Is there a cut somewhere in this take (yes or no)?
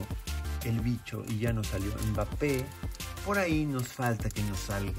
no